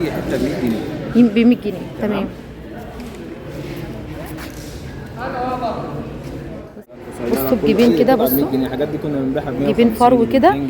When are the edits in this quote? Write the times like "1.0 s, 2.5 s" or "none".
6.8 s